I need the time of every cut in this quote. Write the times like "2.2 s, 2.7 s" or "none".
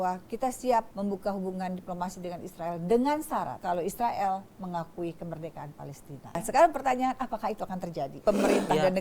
0.9 s, 3.6 s, 6.4 s, 8.2 s